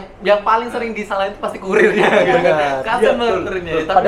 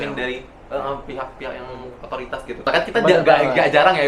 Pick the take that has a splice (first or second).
second